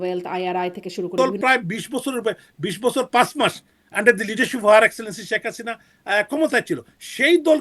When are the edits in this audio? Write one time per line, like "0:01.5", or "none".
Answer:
0:01.1

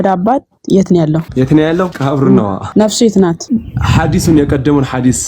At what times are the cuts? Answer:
0:01.3
0:02.0
0:02.6
0:03.4

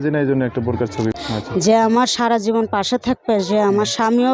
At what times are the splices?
0:01.1

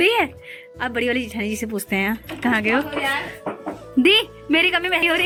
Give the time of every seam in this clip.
none

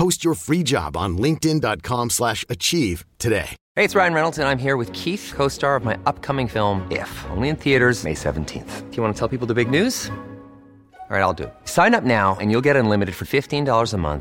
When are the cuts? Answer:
0:03.6

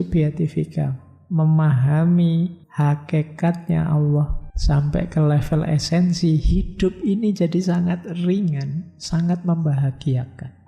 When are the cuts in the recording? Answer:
0:02.6
0:04.5

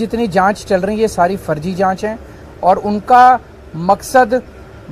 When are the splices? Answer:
none

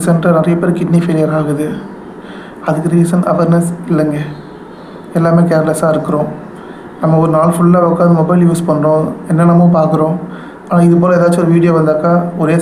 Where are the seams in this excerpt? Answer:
none

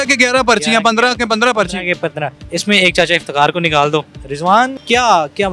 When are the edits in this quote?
0:02.4
0:04.6

